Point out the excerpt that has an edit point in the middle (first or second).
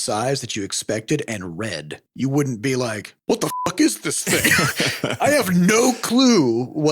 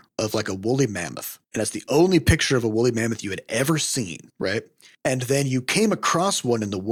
first